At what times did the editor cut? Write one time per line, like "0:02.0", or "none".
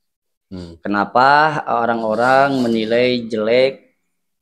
none